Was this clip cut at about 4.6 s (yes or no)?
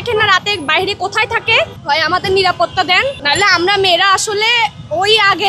no